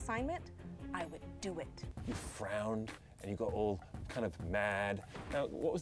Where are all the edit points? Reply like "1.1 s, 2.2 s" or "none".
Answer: 1.9 s